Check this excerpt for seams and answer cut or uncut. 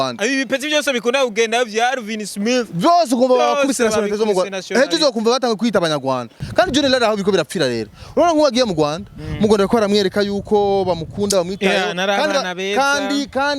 cut